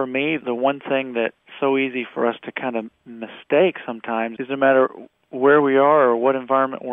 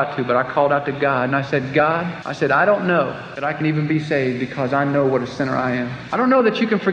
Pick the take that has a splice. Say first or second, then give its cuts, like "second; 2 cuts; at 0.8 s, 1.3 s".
second; 3 cuts; at 2.2 s, 3.2 s, 6.0 s